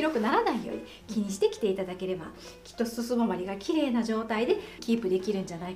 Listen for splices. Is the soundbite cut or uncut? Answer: cut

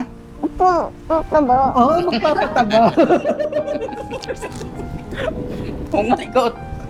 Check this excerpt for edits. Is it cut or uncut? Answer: uncut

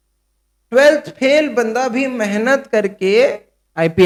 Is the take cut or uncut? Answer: uncut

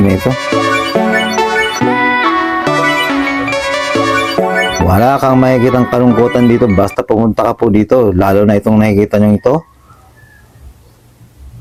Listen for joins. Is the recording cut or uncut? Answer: uncut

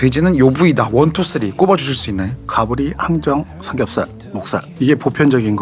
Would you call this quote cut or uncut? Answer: cut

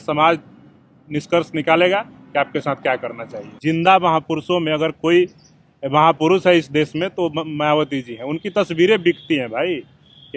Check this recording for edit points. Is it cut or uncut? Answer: cut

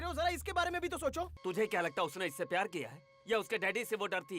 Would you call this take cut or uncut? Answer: cut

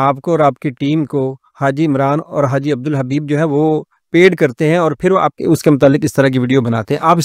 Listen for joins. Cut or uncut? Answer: uncut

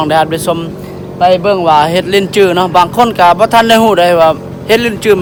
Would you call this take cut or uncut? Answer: uncut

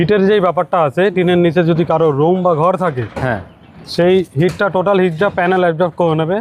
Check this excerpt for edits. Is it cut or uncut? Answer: uncut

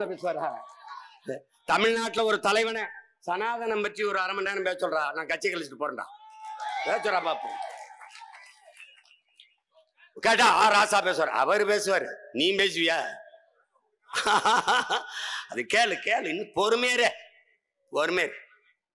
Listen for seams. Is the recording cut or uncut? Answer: uncut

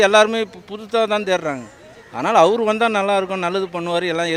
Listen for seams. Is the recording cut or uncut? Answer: uncut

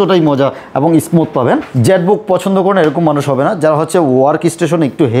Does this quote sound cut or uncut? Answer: cut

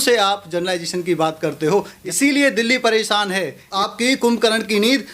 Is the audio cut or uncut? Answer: cut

